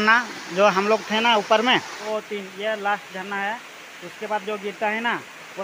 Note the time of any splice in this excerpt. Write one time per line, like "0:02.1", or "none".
0:02.0